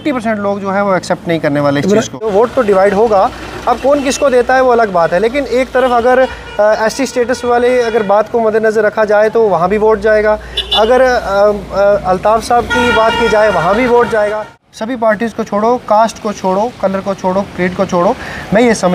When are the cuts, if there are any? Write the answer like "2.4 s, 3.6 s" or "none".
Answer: 2.3 s, 14.6 s